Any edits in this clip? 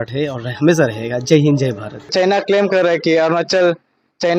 no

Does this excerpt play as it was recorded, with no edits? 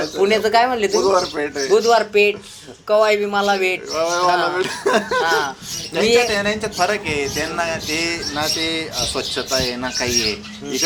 yes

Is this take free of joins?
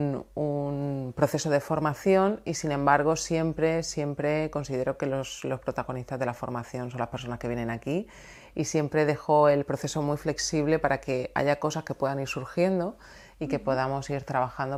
yes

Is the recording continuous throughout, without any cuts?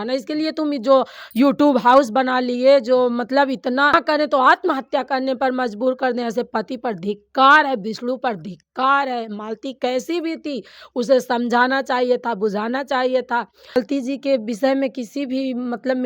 no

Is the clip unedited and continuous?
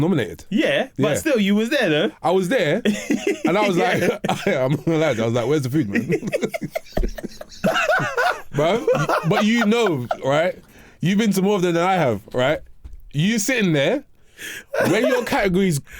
no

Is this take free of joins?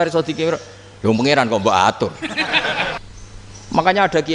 no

